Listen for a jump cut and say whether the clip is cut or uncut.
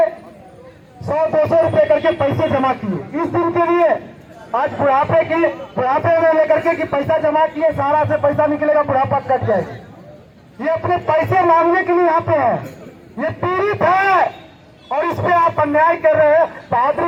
uncut